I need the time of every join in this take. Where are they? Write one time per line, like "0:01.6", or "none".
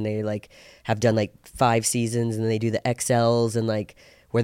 none